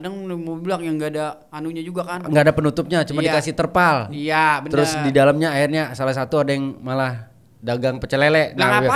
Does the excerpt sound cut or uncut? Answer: uncut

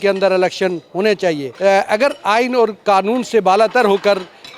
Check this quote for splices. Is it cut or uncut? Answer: cut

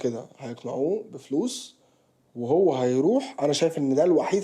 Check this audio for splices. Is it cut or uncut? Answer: uncut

